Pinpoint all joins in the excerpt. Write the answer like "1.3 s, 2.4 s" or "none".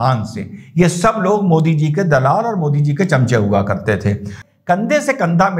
4.4 s